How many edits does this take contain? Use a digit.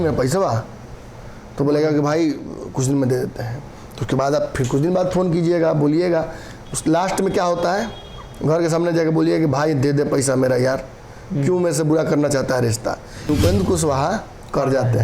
1